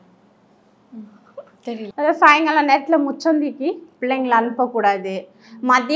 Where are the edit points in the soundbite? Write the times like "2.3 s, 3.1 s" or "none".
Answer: 1.9 s